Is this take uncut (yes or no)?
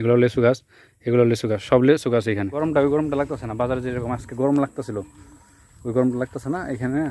no